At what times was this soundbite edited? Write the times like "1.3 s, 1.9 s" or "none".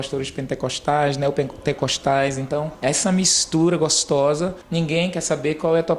2.7 s, 4.6 s